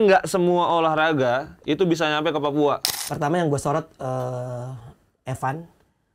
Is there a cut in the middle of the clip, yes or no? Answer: yes